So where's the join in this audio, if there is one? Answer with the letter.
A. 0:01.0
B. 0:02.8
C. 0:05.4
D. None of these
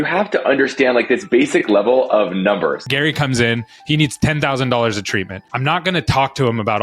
B